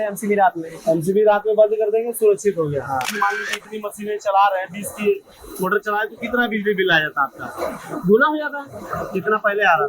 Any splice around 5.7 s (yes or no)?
no